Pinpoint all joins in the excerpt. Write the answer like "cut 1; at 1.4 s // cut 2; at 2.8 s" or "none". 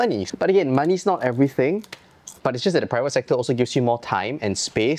none